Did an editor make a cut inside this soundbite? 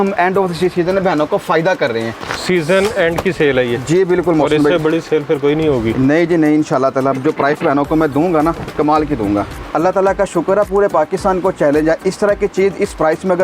yes; 2 cuts; at 2.2 s, 9.6 s

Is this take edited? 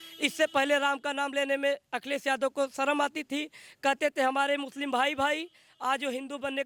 no; 0 cuts

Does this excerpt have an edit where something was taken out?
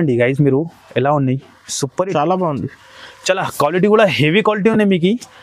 no; 0 cuts

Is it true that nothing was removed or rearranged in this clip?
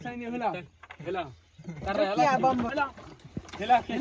no; 1 cut; at 2.7 s

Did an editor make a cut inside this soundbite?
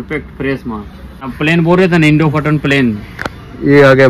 yes; 1 cut; at 1.2 s

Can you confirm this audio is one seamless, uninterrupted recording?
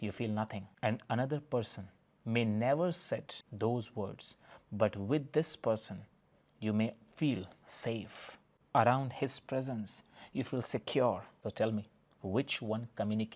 yes; 0 cuts

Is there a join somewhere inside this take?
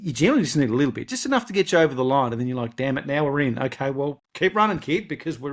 yes; 1 cut; at 4.2 s

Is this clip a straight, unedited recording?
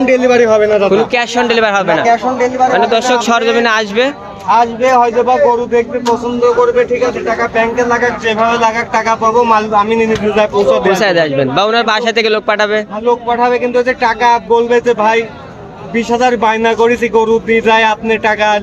yes; 0 cuts

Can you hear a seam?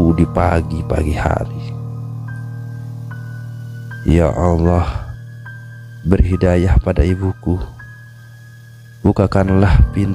no; 0 cuts

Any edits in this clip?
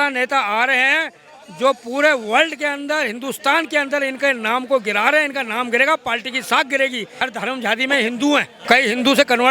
yes; 2 cuts; at 7.1 s, 8.5 s

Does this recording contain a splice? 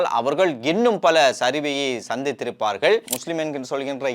yes; 1 cut; at 3.2 s

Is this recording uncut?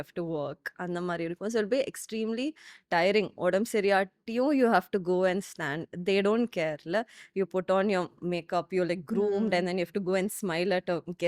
yes; 0 cuts

